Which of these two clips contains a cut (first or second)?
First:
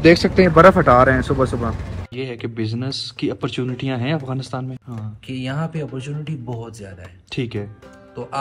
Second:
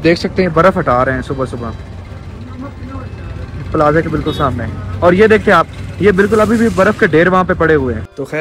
first